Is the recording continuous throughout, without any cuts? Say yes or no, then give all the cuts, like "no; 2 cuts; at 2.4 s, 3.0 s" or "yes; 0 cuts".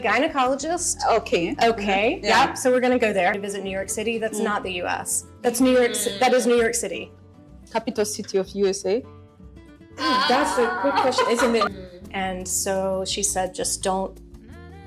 no; 3 cuts; at 3.4 s, 7.3 s, 11.7 s